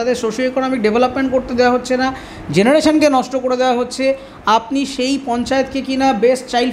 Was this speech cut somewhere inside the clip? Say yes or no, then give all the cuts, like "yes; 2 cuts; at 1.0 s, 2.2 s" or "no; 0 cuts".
no; 0 cuts